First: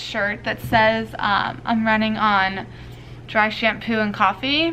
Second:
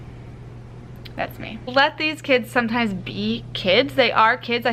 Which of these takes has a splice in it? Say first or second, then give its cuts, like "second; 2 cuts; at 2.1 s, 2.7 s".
second; 1 cut; at 1.7 s